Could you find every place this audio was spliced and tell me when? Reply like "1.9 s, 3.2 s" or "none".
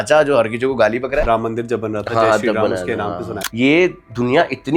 1.2 s, 3.3 s